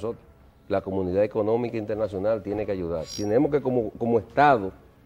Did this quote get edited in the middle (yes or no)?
yes